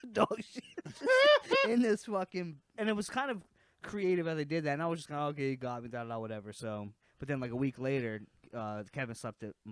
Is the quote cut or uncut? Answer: cut